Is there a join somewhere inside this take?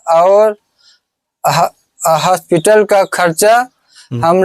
no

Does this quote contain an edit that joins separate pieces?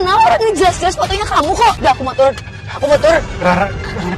no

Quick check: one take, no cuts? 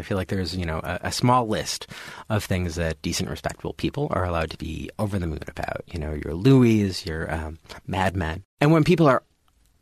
no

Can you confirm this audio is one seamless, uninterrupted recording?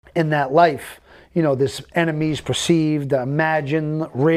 yes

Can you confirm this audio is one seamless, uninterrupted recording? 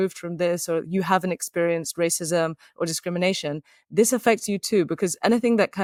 yes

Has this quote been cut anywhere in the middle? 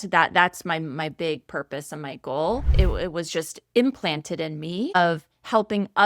yes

